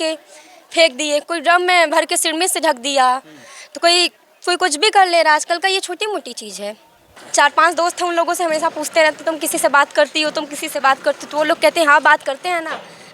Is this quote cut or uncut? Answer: cut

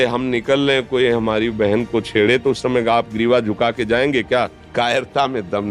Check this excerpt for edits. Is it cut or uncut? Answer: cut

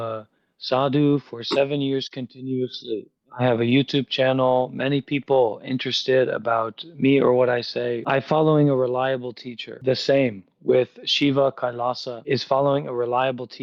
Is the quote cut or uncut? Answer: cut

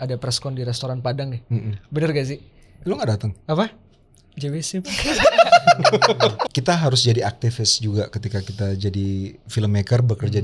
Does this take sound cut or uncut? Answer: cut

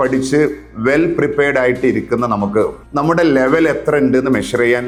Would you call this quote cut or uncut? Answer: uncut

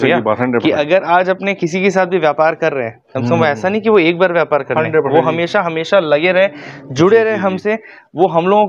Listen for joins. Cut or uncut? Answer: uncut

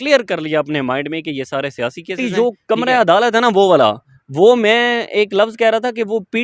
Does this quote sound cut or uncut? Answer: cut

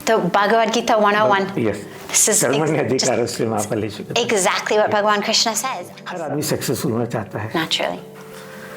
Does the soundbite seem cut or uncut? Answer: cut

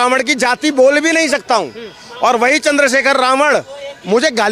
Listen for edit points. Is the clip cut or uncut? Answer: uncut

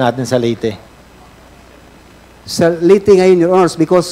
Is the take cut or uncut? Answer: cut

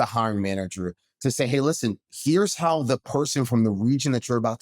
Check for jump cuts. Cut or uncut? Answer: cut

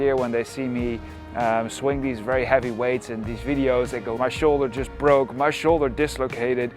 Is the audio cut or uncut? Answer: cut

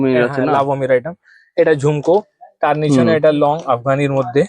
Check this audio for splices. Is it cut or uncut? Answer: uncut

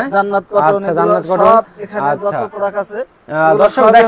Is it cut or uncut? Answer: uncut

